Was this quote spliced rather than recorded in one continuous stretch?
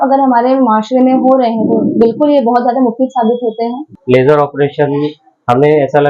yes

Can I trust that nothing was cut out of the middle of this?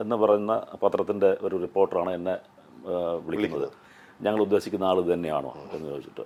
yes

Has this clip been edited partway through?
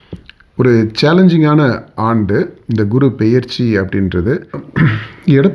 yes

